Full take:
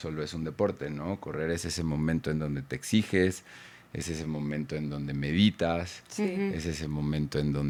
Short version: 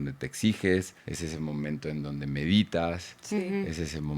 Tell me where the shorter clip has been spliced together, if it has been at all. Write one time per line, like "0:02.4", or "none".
0:01.0